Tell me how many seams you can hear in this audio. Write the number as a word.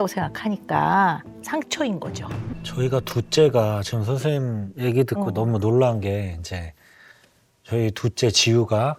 one